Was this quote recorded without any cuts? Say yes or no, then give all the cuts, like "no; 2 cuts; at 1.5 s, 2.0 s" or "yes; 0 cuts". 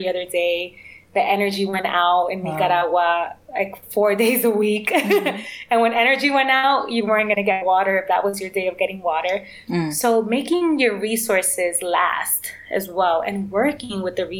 yes; 0 cuts